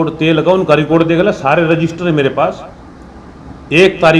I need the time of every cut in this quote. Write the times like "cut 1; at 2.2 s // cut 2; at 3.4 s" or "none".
none